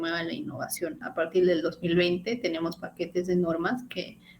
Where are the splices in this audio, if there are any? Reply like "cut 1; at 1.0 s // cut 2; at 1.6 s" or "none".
cut 1; at 1.1 s